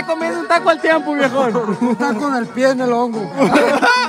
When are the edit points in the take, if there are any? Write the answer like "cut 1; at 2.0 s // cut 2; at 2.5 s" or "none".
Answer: none